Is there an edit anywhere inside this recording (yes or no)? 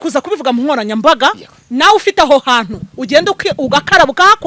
no